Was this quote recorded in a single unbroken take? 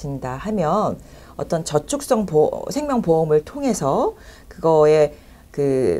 yes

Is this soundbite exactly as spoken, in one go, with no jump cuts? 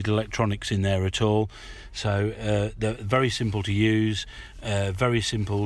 yes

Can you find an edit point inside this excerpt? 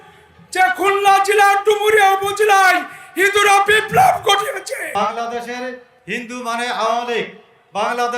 yes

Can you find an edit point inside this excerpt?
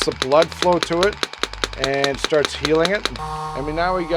yes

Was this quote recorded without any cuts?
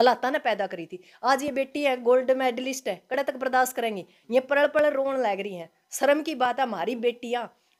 yes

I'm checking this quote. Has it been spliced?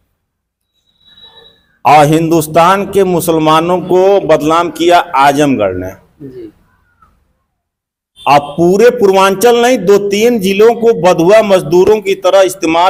no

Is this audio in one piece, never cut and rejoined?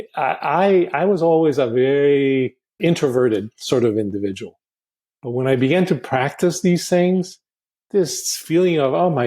no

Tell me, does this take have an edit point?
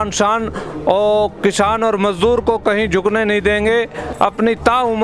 yes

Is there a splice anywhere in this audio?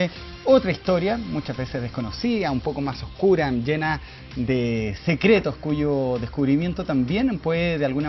yes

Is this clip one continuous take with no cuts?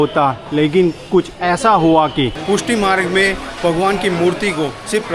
no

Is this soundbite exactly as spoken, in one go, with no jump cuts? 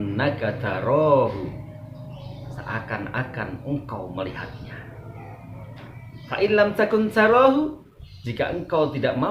yes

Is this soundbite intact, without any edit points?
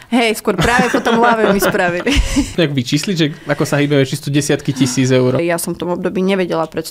no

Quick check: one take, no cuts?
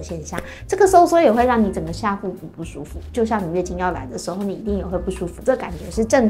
yes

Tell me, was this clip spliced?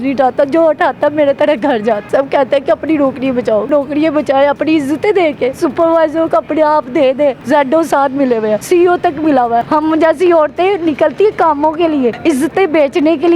yes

